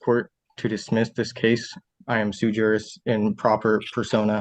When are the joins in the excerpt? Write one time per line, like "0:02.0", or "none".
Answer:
0:01.8